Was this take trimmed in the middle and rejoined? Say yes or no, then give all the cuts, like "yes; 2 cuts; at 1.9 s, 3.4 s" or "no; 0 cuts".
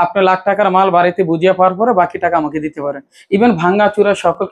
no; 0 cuts